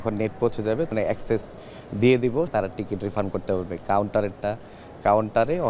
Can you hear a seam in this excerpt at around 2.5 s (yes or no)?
yes